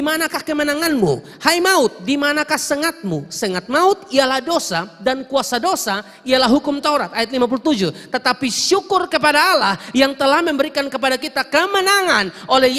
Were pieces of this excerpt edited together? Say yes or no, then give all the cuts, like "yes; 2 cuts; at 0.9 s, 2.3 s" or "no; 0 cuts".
no; 0 cuts